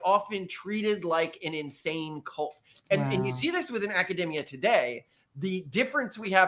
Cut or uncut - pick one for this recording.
uncut